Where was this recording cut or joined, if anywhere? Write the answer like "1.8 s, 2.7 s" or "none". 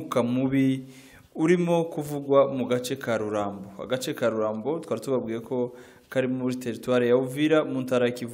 none